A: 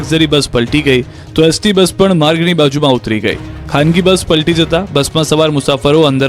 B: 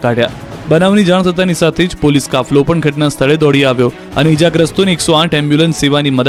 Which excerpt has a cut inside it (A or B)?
A